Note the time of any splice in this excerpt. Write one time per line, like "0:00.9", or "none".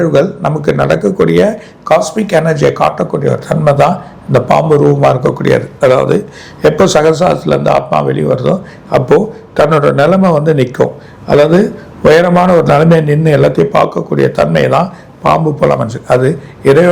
none